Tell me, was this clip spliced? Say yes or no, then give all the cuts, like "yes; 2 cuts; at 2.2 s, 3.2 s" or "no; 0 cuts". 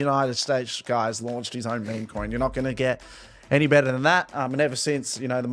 no; 0 cuts